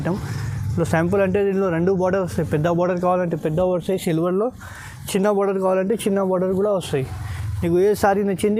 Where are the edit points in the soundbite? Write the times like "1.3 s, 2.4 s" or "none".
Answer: none